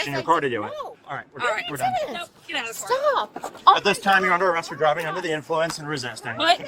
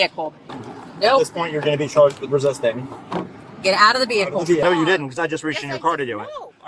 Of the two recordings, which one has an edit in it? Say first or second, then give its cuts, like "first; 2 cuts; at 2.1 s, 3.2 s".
second; 1 cut; at 4.6 s